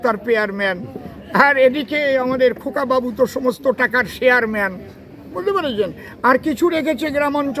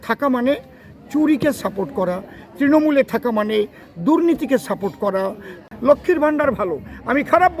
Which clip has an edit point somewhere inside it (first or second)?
second